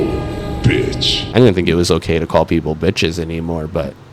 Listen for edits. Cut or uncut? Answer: cut